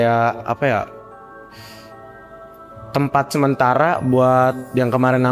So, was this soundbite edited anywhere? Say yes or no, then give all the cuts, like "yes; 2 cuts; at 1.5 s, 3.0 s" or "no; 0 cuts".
no; 0 cuts